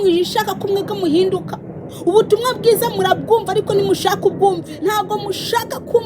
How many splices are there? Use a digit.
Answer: 1